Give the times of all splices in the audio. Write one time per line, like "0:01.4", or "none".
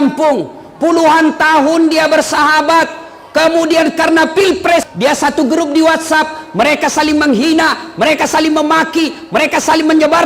0:04.9